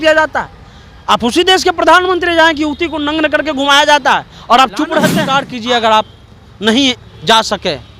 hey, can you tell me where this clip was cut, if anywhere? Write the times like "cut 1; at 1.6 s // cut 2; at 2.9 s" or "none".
cut 1; at 5.2 s